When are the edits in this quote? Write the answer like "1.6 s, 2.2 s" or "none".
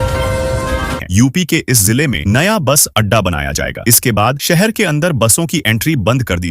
1.0 s